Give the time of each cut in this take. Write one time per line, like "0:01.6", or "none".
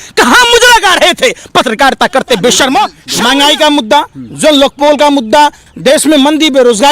0:03.0
0:05.6